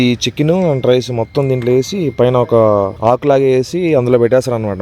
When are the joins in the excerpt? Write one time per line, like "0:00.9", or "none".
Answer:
0:02.9